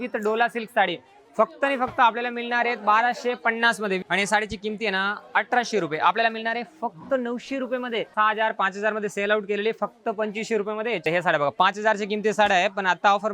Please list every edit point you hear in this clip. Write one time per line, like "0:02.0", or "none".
0:04.0
0:08.1
0:11.0

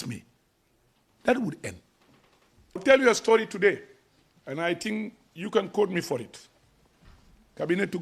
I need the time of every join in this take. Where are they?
0:02.8

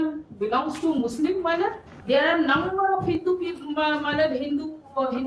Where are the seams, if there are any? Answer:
0:01.9

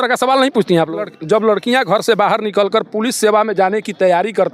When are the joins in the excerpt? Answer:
0:01.2

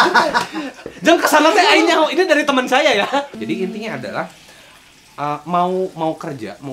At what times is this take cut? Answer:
0:03.3

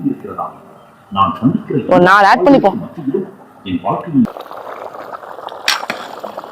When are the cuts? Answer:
0:04.3

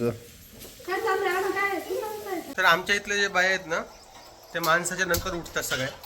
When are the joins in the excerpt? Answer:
0:02.5

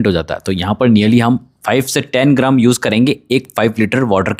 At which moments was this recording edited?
none

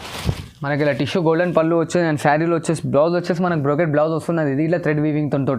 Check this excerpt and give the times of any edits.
none

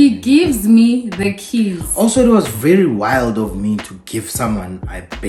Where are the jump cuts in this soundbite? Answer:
none

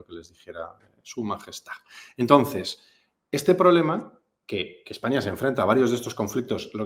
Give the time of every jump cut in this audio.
none

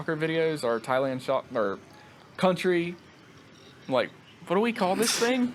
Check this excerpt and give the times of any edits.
none

